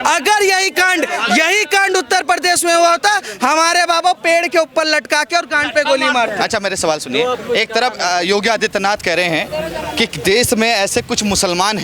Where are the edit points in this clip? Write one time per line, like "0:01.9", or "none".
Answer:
none